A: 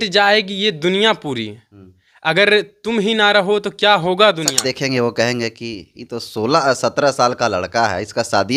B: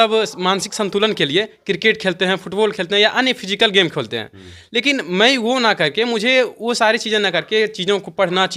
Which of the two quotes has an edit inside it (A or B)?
A